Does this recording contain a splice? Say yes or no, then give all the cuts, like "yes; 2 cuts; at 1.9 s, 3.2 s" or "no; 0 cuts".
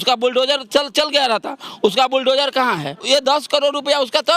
yes; 1 cut; at 3.0 s